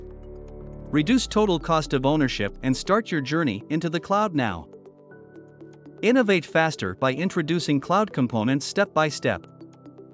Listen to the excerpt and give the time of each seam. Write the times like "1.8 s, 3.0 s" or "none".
0.9 s